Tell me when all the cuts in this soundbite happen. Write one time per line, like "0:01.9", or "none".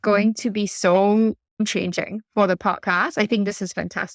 0:01.6